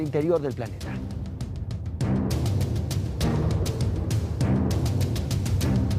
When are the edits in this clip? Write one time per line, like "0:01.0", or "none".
none